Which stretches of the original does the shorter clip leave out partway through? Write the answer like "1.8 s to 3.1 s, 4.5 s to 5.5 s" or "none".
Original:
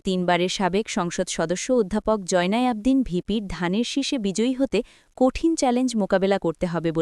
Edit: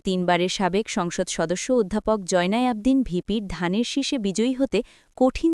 none